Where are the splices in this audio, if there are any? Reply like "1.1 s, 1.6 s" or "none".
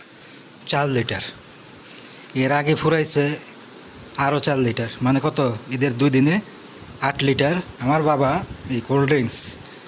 7.7 s